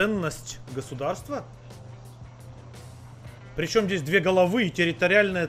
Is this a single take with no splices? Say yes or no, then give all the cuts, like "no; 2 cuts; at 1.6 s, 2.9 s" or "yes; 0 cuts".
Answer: yes; 0 cuts